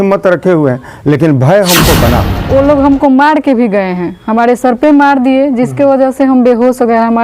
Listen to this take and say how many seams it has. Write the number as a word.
one